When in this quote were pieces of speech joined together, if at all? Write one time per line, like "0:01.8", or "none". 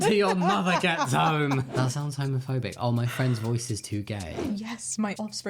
0:01.7
0:04.4